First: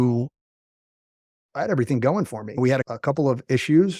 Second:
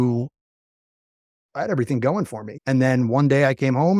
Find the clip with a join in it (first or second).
second